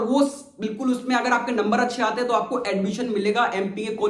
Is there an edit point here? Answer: no; 0 cuts

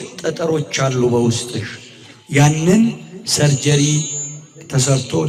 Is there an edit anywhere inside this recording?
no; 0 cuts

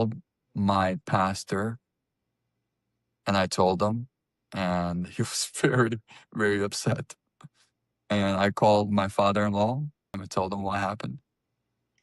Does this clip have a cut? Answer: yes; 1 cut; at 10.2 s

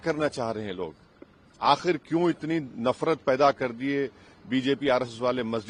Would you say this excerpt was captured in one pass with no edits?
yes; 0 cuts

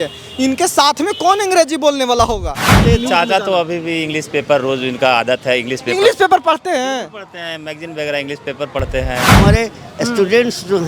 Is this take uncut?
no; 2 cuts; at 2.8 s, 9.3 s

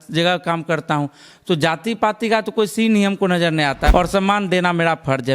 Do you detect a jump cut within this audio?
yes; 1 cut; at 3.9 s

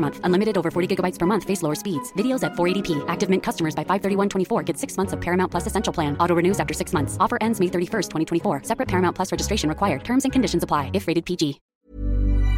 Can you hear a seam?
yes; 1 cut; at 11.6 s

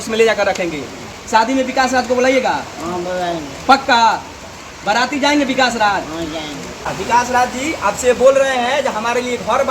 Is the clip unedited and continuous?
no; 2 cuts; at 1.2 s, 6.8 s

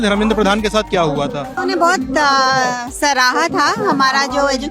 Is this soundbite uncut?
no; 1 cut; at 1.5 s

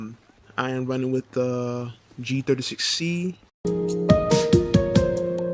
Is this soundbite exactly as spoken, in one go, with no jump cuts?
yes; 0 cuts

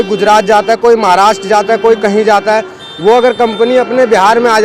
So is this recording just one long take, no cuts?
yes; 0 cuts

